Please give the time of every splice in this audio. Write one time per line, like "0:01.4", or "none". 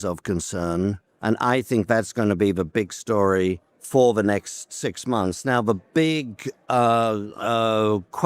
0:01.1
0:03.7